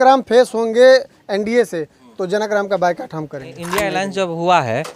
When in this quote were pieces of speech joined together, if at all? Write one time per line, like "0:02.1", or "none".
0:03.6